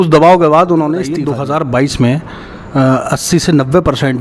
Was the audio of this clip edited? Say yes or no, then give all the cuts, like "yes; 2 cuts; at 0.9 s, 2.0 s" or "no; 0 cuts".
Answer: yes; 1 cut; at 1.2 s